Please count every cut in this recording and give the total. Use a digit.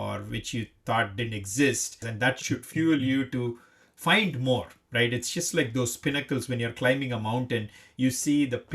1